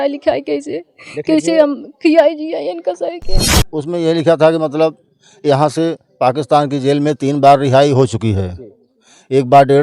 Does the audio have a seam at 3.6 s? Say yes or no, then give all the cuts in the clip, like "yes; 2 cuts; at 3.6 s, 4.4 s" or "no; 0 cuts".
yes; 1 cut; at 3.6 s